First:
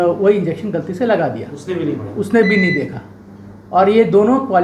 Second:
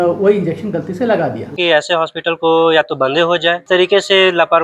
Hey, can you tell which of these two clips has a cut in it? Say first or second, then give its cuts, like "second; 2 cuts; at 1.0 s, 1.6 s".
second; 2 cuts; at 1.6 s, 3.7 s